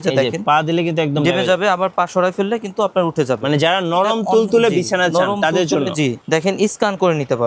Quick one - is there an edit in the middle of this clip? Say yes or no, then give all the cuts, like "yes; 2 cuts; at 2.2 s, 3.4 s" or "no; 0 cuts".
yes; 1 cut; at 6.2 s